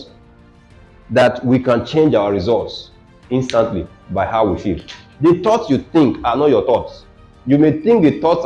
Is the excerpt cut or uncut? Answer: cut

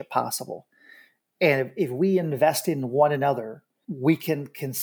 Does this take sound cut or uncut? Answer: uncut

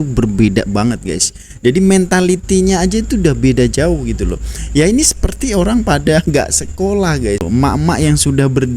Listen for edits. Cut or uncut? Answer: cut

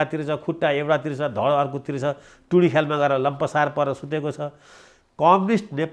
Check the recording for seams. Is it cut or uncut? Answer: uncut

